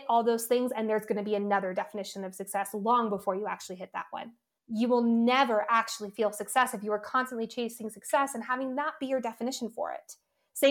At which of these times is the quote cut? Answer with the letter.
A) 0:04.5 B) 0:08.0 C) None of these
A